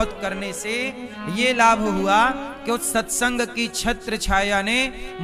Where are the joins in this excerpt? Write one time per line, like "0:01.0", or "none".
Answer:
none

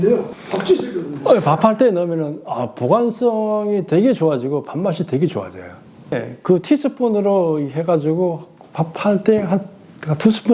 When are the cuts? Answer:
0:06.2

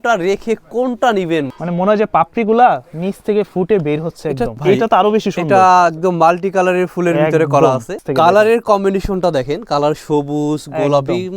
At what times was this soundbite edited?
0:01.5
0:04.6
0:07.9

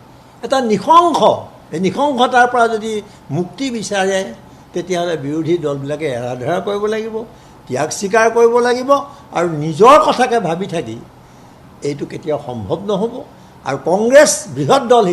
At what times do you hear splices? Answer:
none

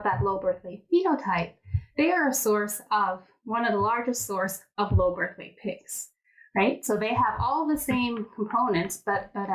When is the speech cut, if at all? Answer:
none

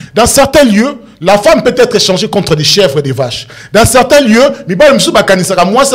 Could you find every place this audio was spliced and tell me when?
none

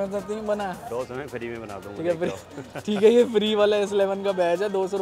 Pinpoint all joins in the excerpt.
none

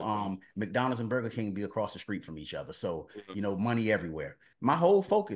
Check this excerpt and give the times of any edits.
0:04.4

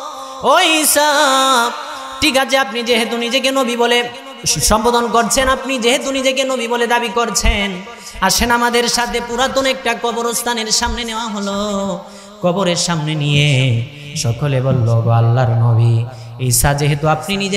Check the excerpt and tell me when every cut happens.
none

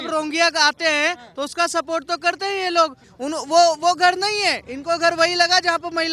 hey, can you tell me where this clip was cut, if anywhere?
0:03.1

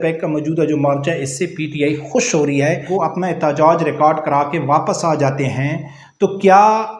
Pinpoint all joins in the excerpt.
0:02.8

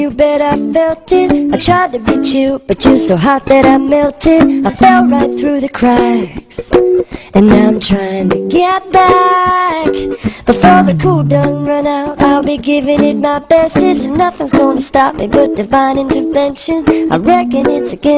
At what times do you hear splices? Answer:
none

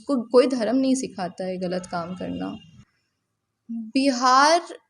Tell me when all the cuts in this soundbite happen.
0:02.8

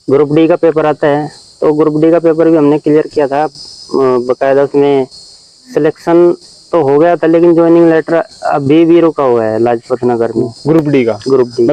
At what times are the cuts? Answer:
none

